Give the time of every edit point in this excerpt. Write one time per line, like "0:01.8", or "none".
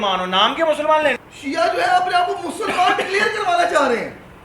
0:01.2